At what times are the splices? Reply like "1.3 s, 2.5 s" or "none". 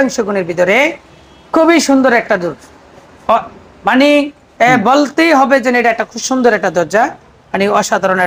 none